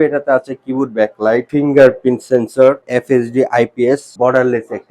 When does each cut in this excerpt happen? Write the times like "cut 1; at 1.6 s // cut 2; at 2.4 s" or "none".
cut 1; at 1.5 s // cut 2; at 2.8 s // cut 3; at 4.1 s